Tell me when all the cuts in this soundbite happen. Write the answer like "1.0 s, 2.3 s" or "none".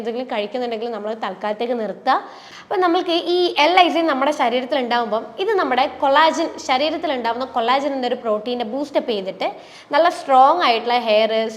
2.4 s